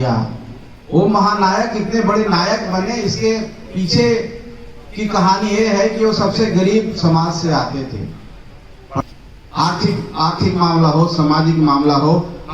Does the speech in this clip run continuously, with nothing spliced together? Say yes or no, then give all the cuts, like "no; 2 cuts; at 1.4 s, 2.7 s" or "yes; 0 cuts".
no; 1 cut; at 9.0 s